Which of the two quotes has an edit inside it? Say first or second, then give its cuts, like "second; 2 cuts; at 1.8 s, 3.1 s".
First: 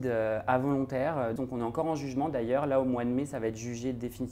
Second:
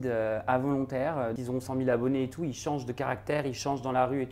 second; 1 cut; at 1.4 s